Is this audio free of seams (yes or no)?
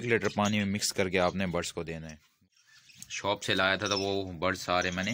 no